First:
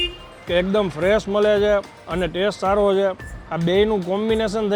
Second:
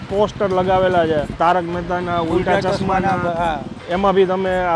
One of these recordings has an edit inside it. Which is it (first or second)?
second